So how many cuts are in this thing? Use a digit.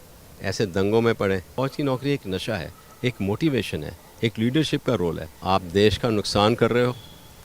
2